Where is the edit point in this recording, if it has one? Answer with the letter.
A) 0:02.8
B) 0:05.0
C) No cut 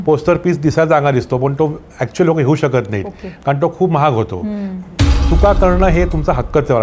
B